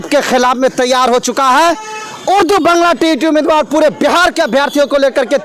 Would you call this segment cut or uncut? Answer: uncut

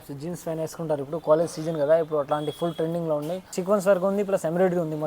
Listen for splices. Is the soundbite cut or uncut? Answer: cut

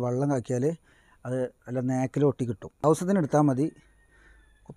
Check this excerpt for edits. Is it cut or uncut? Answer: cut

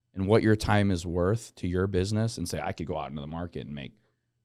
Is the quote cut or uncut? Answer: uncut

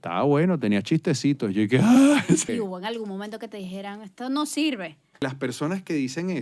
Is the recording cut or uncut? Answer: cut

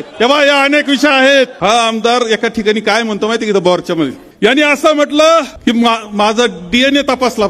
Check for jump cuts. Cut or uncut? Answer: cut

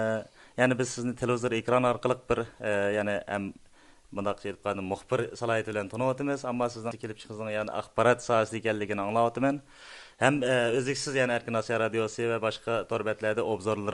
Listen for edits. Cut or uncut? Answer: cut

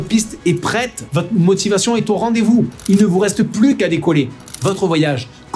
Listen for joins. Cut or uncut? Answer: cut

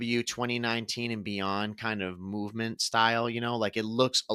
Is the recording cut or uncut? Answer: uncut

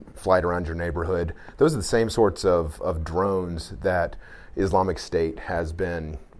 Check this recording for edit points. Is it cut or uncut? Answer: uncut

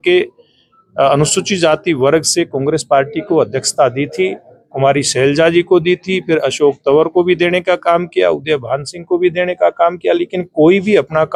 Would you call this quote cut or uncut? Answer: uncut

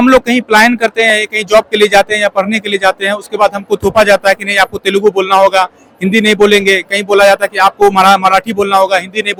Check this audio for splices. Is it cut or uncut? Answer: uncut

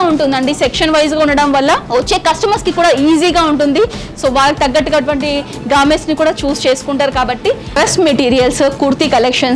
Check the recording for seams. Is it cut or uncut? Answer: cut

